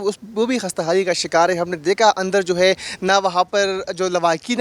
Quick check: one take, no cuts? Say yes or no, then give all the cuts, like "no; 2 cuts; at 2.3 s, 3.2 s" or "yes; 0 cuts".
yes; 0 cuts